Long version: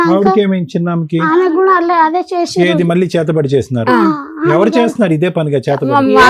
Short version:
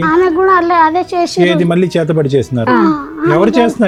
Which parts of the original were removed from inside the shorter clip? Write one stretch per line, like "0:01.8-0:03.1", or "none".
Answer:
none